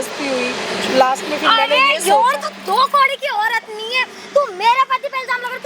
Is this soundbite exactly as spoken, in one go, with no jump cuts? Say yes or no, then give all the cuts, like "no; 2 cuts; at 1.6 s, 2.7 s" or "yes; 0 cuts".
yes; 0 cuts